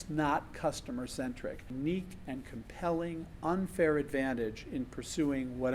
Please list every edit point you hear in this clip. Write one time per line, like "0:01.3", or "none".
0:01.7